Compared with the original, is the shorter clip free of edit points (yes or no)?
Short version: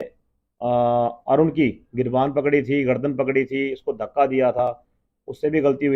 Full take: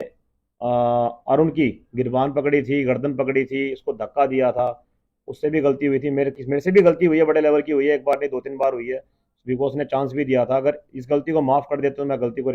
yes